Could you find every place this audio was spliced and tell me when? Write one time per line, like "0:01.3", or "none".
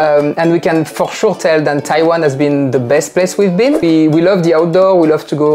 0:03.8